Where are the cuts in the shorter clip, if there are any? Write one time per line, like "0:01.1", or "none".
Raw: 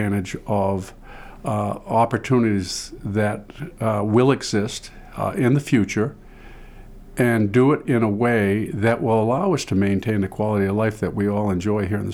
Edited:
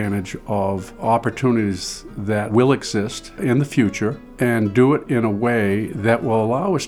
0:00.9
0:02.5
0:03.4
0:04.2

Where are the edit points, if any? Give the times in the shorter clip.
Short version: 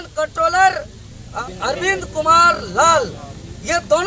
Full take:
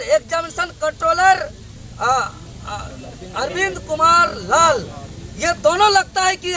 0:01.2

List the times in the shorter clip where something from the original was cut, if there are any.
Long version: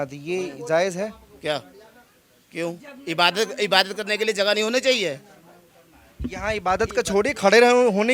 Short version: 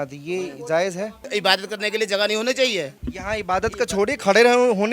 0:01.3
0:03.0

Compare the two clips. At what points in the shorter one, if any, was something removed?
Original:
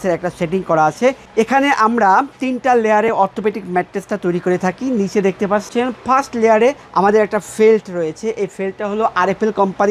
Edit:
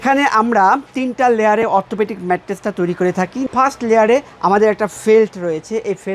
0:03.5

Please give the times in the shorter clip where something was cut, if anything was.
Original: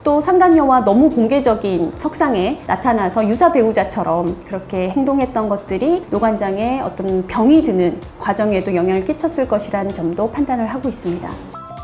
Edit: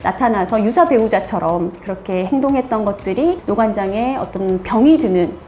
none

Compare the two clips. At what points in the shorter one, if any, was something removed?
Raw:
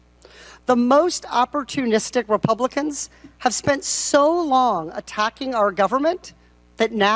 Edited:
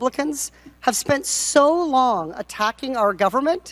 none

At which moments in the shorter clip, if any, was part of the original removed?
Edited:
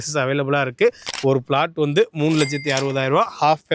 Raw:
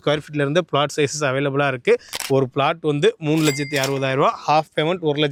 none

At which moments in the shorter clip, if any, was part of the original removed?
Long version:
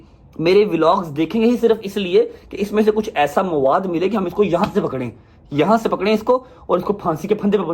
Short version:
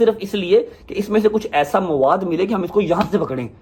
none

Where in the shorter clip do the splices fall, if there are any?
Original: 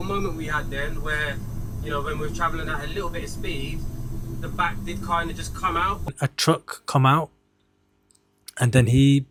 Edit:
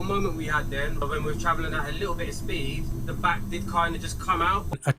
0:01.0
0:02.9

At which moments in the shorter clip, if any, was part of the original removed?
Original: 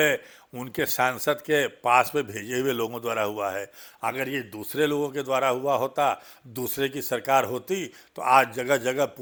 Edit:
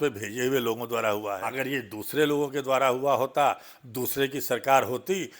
0:01.4

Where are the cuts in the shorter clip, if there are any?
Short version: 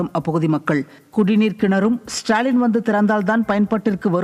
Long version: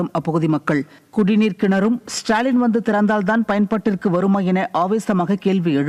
none

